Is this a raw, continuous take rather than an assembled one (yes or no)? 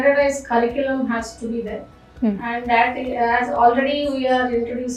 yes